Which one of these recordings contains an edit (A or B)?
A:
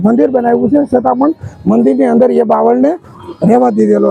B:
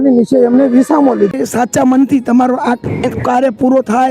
B